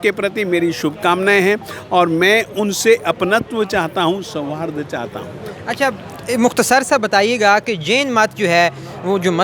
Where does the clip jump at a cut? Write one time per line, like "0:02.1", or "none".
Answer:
none